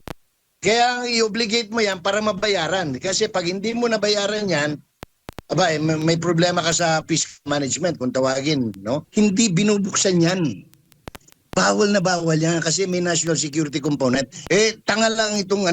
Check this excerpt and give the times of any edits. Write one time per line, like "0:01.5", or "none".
0:09.1
0:14.3

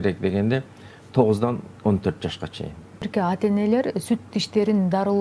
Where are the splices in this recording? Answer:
0:03.1

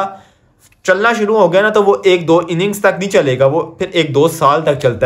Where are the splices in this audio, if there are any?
none

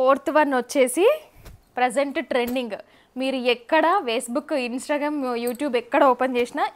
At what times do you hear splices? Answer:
none

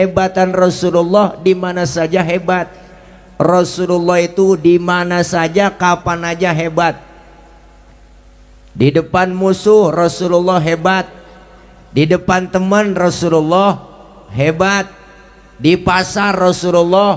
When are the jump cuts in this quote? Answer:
none

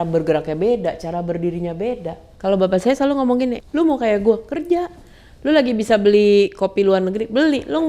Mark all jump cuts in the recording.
0:02.3
0:03.6

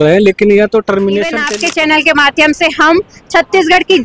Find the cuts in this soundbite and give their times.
0:01.4

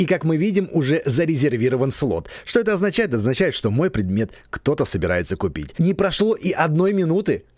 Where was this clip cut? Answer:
0:05.6

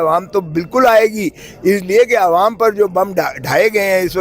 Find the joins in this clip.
none

